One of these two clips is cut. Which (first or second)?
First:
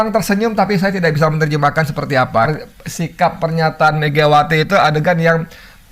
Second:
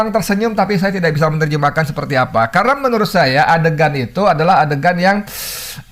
first